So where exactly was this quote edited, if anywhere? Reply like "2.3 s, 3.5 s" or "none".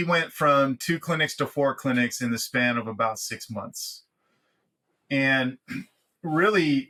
none